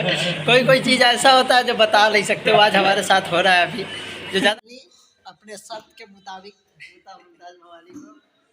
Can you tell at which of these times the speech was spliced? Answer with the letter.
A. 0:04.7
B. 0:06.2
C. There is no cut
A